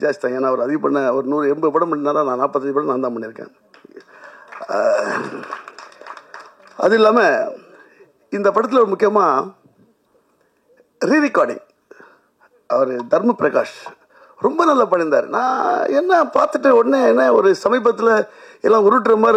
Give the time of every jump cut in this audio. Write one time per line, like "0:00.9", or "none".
none